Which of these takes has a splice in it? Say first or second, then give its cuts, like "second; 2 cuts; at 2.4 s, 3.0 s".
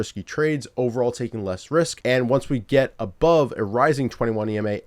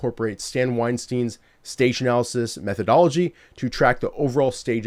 first; 1 cut; at 2.0 s